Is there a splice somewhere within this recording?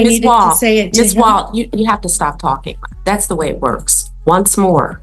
yes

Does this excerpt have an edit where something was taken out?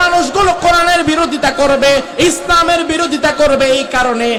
no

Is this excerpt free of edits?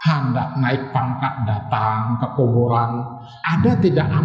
no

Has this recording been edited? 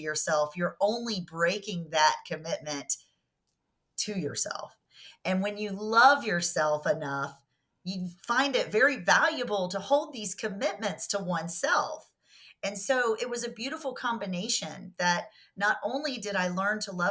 no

